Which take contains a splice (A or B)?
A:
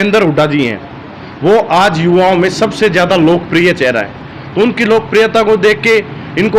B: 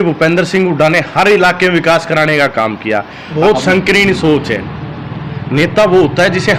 B